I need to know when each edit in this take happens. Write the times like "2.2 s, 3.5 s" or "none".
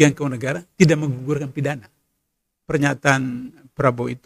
2.7 s

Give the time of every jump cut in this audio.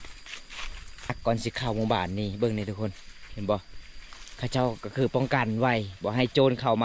1.1 s

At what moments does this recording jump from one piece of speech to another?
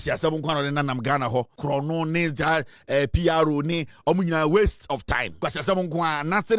1.5 s, 5.4 s

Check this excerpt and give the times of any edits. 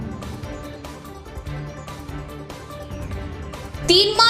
2.4 s, 3.3 s

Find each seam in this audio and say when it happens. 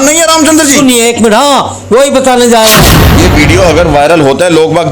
3.1 s

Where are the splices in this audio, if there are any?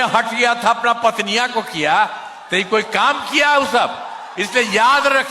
4.3 s

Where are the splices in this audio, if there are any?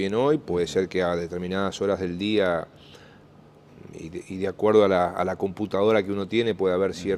5.8 s

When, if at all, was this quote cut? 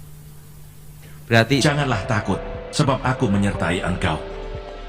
1.6 s

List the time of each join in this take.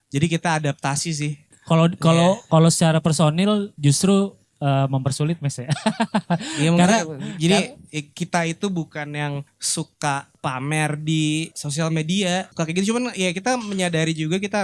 1.5 s, 9.6 s, 10.3 s, 11.6 s, 12.5 s

